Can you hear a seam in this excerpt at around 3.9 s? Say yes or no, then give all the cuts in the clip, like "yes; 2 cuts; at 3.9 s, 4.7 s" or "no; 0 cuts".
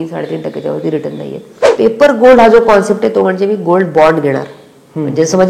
no; 1 cut; at 1.6 s